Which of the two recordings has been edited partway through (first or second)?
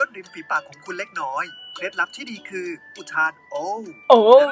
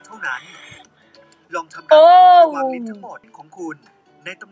second